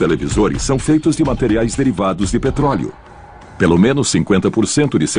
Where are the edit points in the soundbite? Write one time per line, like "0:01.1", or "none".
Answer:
0:03.0